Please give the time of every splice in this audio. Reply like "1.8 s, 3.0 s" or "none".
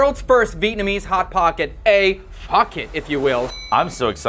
none